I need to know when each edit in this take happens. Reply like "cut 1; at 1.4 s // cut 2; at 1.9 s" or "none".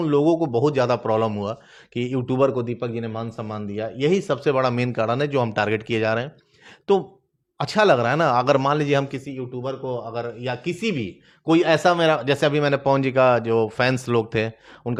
none

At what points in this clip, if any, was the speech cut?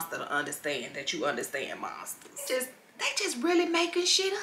cut 1; at 2.5 s

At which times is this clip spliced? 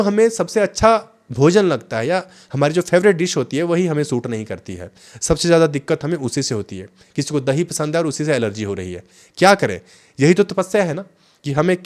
none

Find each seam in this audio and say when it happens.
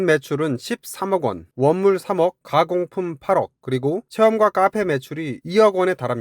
none

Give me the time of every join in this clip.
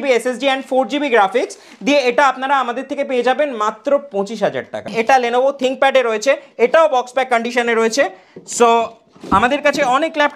cut 1; at 4.9 s

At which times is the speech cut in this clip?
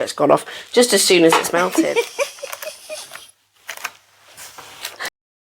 cut 1; at 1.7 s

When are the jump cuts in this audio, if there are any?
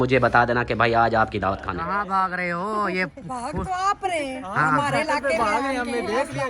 cut 1; at 1.9 s

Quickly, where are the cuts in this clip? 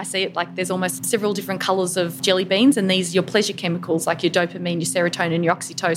cut 1; at 1.0 s // cut 2; at 2.2 s

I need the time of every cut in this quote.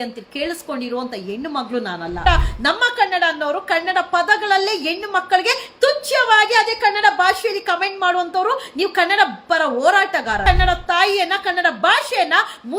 cut 1; at 2.2 s // cut 2; at 10.4 s

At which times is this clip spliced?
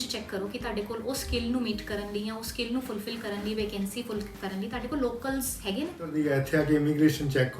cut 1; at 6.1 s

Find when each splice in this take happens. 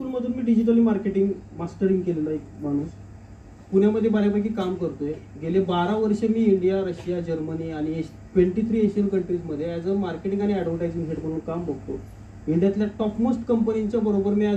none

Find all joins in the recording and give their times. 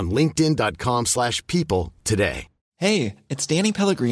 cut 1; at 2.6 s

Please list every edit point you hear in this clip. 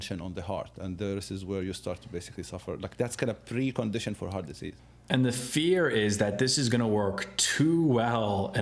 none

